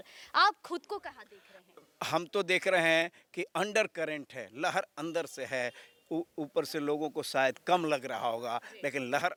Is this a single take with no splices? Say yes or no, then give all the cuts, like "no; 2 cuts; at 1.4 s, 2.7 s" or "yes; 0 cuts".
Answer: yes; 0 cuts